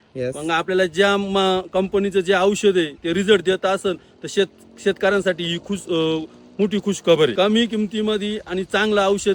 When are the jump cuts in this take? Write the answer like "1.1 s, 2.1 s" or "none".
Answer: 7.3 s